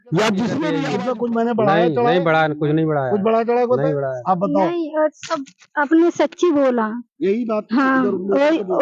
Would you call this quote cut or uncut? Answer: cut